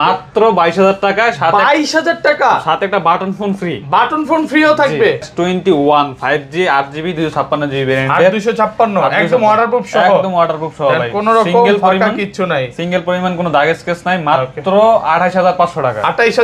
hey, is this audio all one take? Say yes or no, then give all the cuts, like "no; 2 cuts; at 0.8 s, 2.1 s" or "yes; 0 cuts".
no; 1 cut; at 5.3 s